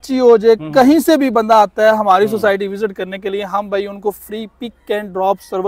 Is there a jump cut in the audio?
no; 0 cuts

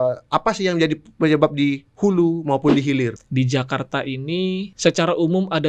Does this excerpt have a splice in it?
yes; 2 cuts; at 3.2 s, 4.7 s

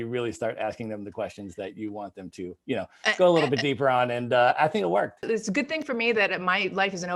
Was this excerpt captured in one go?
no; 1 cut; at 5.2 s

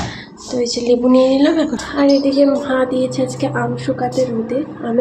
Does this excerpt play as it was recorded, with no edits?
no; 1 cut; at 1.8 s

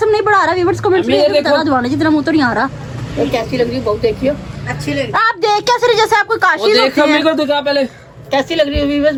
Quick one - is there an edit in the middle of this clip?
no; 0 cuts

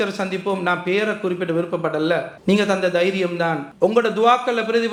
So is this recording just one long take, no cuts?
yes; 0 cuts

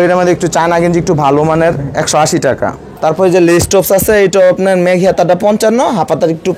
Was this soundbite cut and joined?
yes; 1 cut; at 2.9 s

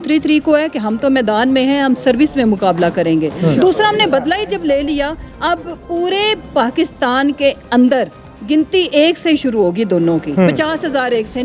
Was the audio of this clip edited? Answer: no; 0 cuts

